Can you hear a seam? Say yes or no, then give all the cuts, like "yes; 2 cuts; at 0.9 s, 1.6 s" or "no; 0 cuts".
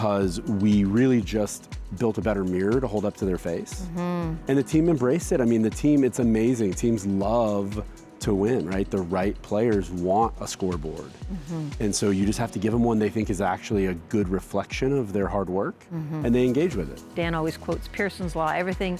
no; 0 cuts